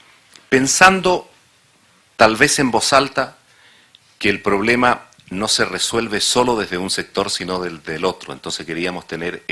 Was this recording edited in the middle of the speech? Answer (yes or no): yes